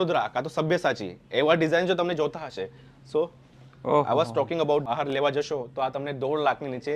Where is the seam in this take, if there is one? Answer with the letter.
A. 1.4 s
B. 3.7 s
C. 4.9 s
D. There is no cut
C